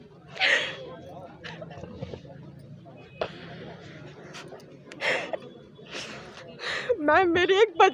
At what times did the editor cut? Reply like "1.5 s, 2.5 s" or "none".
none